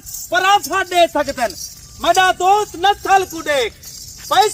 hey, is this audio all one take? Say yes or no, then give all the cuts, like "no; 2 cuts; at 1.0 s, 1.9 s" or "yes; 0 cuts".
yes; 0 cuts